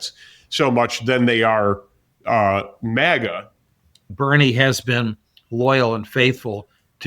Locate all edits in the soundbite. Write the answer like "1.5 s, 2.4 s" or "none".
4.0 s